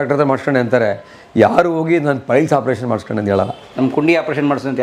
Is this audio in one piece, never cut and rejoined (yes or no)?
yes